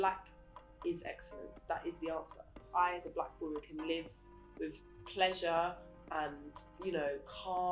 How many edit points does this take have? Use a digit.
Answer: 1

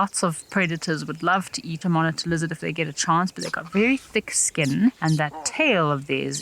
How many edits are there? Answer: 2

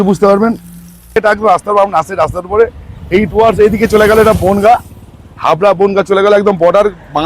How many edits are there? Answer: 1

